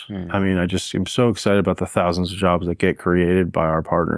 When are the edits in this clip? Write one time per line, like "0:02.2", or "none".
none